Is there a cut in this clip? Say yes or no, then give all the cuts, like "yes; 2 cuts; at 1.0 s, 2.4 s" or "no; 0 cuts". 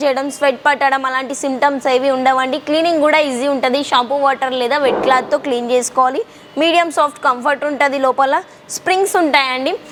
no; 0 cuts